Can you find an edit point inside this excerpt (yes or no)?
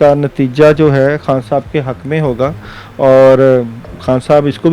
no